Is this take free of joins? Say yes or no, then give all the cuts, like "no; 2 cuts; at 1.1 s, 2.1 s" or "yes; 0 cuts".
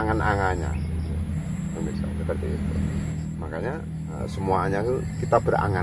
no; 2 cuts; at 3.1 s, 4.2 s